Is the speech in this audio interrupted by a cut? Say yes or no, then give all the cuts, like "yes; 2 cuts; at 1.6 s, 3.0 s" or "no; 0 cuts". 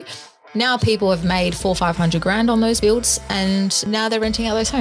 yes; 2 cuts; at 2.8 s, 3.8 s